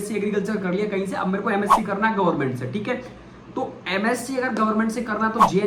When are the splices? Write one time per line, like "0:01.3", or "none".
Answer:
none